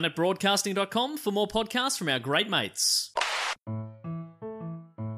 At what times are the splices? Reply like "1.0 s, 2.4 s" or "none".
3.7 s